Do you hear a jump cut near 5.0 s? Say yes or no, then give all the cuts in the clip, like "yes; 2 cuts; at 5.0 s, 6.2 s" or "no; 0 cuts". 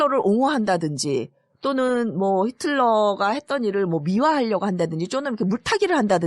no; 1 cut; at 2.7 s